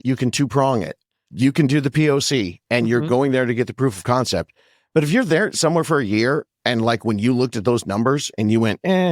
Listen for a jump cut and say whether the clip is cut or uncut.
uncut